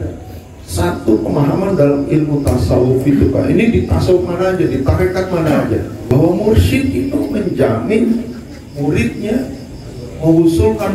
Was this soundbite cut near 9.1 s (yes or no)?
no